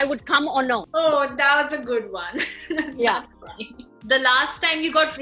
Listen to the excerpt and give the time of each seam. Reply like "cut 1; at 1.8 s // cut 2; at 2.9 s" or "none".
none